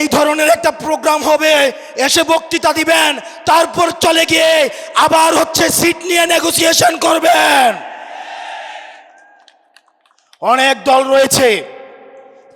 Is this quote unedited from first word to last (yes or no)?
yes